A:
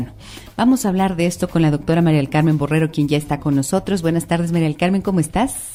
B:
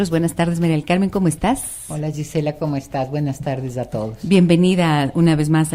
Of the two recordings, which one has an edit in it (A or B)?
B